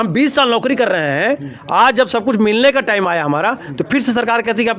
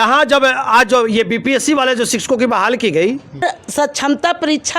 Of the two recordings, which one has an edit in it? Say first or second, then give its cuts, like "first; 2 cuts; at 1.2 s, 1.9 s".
second; 1 cut; at 3.4 s